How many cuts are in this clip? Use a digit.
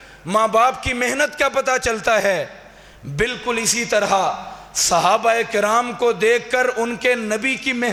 0